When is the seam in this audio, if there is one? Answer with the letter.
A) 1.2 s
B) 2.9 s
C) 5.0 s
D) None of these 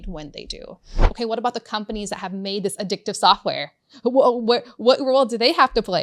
A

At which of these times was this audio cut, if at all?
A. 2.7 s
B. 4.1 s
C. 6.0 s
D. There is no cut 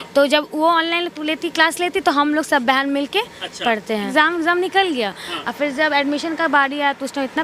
B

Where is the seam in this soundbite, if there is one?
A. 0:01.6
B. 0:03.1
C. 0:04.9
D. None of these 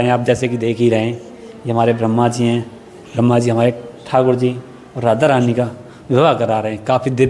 D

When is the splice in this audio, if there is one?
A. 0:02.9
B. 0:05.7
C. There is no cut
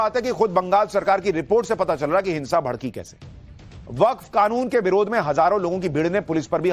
C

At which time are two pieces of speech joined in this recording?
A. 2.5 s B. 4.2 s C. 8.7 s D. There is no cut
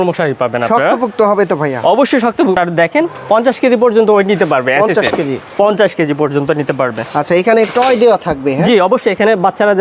D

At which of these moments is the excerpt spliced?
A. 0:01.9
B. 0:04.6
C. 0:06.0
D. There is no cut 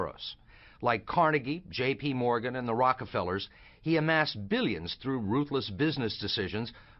D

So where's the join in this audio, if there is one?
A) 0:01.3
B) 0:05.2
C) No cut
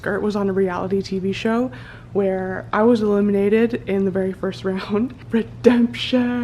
B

